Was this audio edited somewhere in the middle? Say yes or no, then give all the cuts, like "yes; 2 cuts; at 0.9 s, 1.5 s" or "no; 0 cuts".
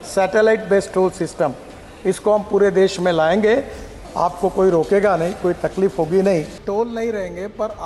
yes; 2 cuts; at 3.9 s, 6.6 s